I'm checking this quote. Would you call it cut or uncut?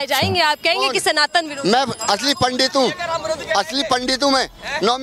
uncut